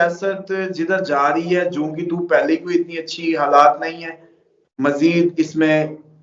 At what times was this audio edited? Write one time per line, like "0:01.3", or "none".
none